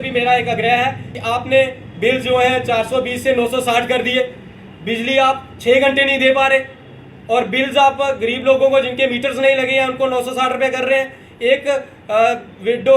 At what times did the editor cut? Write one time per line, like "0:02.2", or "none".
0:01.1